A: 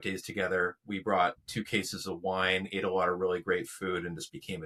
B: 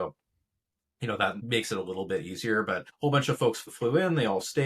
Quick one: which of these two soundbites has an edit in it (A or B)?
B